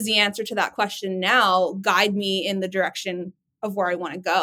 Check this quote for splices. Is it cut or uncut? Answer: uncut